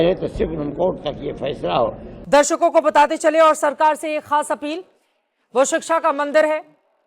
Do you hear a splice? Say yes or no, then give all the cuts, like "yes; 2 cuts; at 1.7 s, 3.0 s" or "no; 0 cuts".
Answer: yes; 1 cut; at 2.1 s